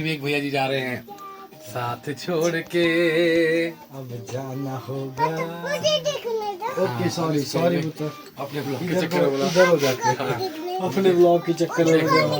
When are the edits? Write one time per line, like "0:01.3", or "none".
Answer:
none